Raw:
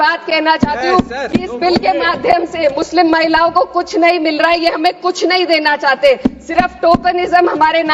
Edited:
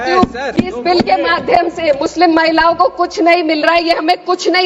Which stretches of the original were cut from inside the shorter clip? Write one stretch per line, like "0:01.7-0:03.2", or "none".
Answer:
none